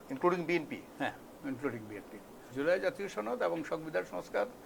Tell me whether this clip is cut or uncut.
cut